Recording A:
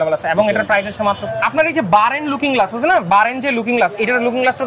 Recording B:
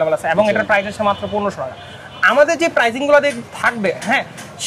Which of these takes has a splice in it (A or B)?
A